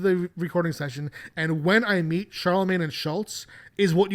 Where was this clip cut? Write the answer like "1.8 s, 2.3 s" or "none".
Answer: none